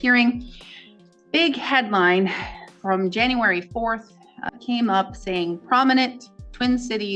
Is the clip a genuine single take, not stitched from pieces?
no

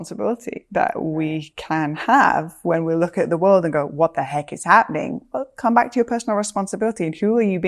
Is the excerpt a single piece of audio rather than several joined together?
yes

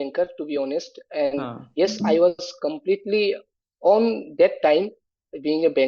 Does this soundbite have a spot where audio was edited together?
no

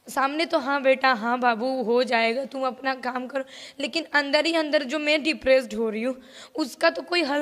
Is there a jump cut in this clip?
no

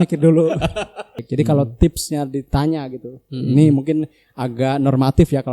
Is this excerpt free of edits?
no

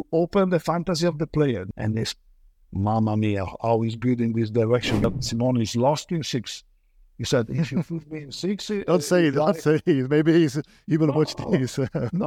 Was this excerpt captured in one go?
no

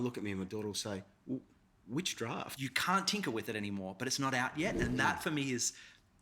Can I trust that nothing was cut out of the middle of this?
no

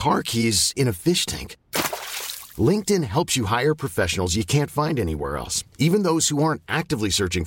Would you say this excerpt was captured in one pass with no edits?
yes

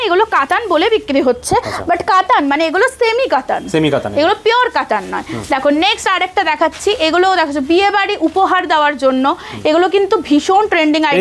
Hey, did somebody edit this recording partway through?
no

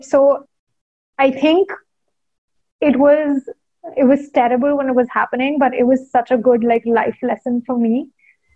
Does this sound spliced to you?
no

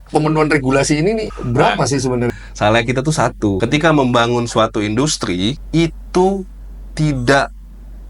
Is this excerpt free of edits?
no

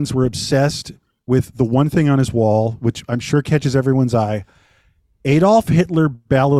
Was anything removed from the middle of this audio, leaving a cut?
no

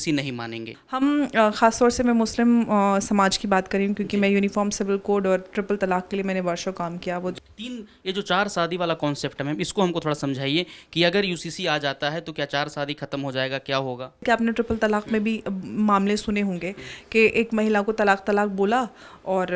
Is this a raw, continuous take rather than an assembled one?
no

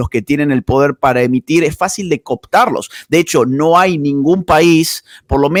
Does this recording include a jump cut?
no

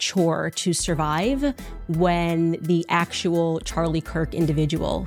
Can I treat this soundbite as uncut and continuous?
yes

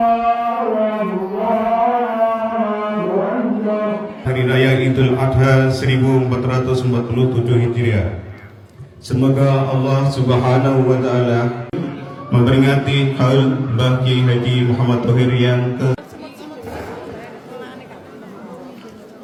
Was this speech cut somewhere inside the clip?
no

